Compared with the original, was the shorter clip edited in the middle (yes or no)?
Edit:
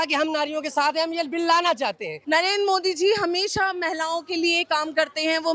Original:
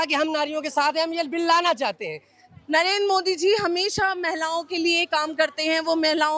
yes